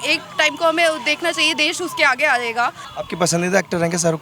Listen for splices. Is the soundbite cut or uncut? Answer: cut